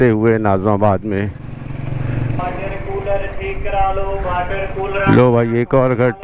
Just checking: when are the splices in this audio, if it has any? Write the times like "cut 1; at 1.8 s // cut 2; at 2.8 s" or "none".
cut 1; at 2.4 s